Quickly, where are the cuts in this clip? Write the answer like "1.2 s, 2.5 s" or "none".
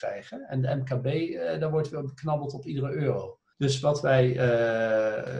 3.4 s